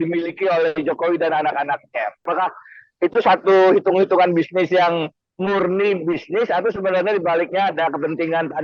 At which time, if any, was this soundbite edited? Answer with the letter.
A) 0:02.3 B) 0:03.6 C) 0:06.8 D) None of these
A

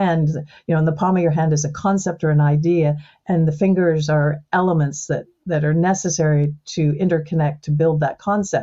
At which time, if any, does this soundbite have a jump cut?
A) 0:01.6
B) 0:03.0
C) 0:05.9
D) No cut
D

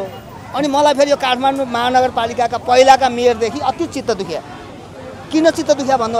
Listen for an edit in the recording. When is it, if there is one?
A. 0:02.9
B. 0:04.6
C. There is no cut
C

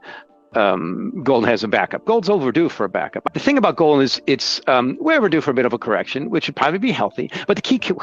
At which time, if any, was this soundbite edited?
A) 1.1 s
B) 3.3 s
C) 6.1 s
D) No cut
B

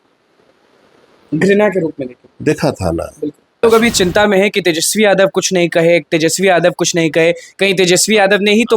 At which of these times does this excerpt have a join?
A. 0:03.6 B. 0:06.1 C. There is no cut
A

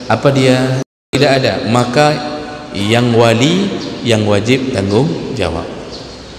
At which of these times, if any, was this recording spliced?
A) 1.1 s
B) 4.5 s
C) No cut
A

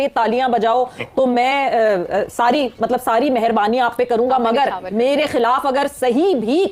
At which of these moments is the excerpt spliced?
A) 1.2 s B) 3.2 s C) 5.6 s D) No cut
D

